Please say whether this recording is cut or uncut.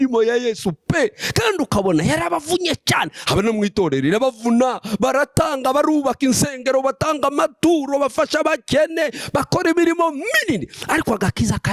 uncut